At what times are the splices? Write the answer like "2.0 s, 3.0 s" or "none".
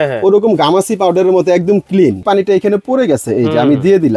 2.2 s

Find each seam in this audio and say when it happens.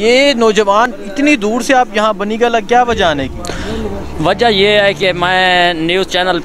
none

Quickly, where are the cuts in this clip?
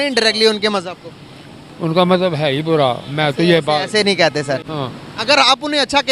4.7 s

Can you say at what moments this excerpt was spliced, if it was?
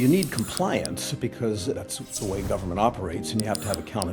2.0 s

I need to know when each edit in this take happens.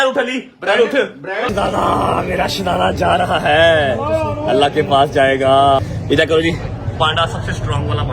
1.5 s, 5.8 s

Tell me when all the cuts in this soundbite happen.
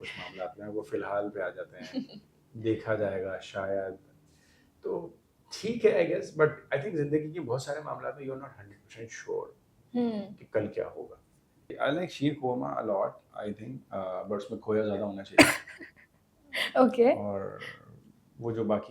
11.7 s

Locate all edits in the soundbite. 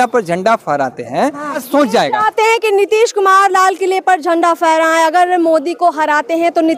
1.6 s

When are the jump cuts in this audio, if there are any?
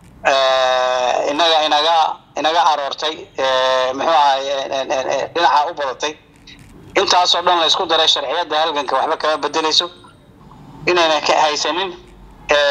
10.3 s

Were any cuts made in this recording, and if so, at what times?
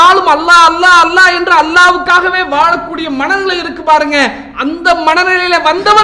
none

